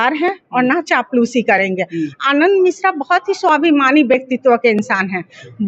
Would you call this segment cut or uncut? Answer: uncut